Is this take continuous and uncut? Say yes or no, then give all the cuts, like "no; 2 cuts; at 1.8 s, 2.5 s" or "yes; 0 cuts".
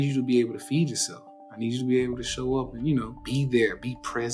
no; 1 cut; at 3.2 s